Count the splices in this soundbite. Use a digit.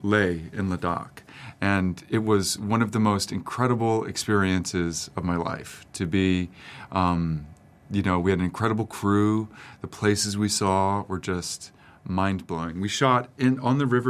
0